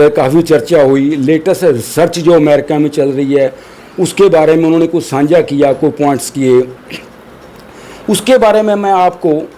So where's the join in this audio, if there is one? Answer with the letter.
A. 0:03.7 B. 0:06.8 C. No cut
C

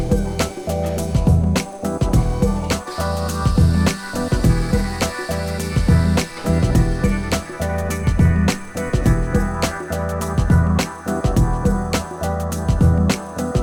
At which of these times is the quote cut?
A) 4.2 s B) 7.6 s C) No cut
C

